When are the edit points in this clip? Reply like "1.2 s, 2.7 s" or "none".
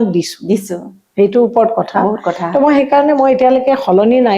none